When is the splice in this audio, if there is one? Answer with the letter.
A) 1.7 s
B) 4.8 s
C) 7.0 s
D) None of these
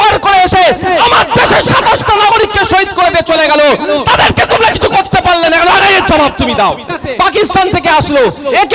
C